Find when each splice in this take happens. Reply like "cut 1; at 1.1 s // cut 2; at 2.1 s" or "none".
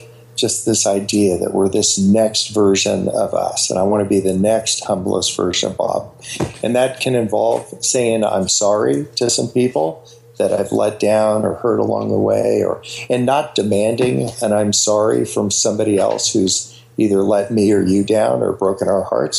none